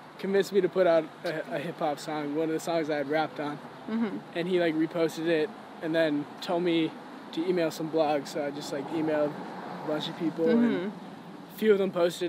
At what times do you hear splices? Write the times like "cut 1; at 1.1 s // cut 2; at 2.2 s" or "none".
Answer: none